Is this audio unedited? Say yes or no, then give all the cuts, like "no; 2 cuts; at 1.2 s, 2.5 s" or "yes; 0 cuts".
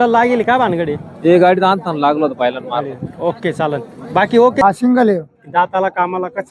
no; 1 cut; at 4.6 s